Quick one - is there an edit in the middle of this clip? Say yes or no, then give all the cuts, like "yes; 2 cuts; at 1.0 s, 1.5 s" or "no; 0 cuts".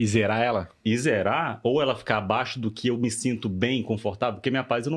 no; 0 cuts